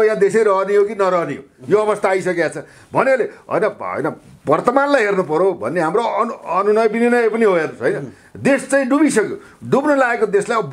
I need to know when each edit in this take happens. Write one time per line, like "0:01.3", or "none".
none